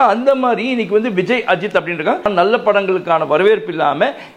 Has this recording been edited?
yes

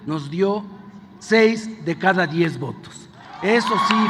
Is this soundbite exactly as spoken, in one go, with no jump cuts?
yes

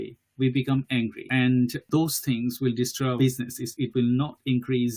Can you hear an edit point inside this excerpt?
no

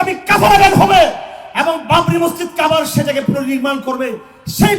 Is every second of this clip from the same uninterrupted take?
yes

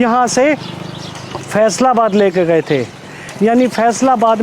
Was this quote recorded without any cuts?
no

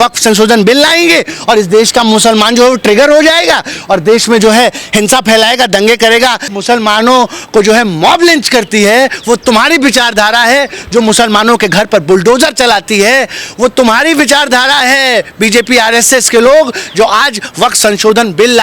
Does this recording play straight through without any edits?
no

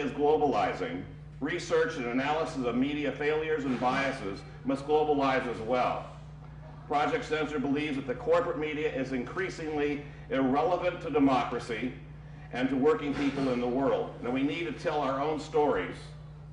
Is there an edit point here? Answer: no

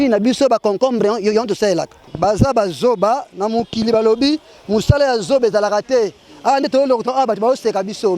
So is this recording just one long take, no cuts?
no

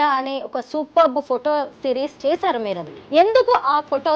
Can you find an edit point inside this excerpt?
yes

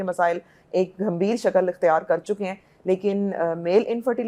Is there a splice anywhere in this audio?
no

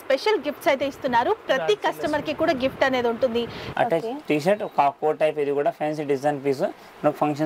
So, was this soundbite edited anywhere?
yes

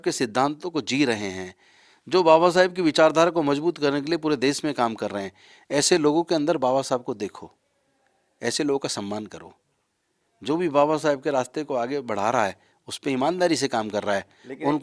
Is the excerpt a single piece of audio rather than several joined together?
yes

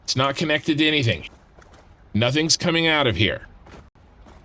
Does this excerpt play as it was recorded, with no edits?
no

